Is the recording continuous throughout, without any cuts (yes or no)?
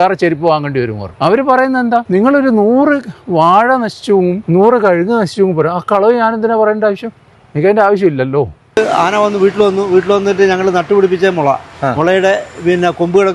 no